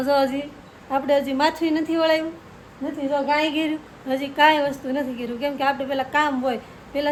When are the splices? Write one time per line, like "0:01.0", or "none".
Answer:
none